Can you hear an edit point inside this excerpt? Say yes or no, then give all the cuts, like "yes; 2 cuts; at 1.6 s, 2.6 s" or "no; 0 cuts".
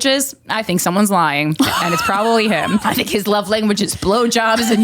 yes; 1 cut; at 2.8 s